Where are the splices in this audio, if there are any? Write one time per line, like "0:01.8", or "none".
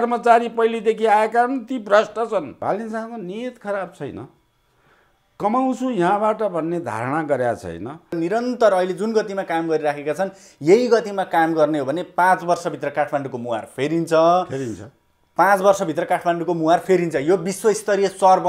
0:02.5
0:08.2

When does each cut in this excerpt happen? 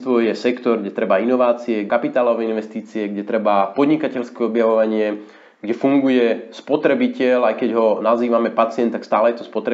0:01.9

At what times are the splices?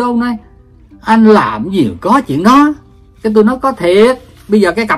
none

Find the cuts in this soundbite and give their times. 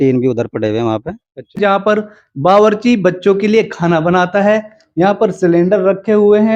0:01.5

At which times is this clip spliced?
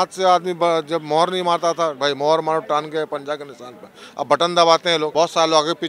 0:02.0
0:05.1

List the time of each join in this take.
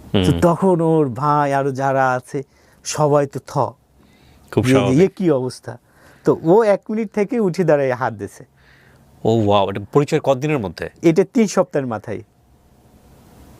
none

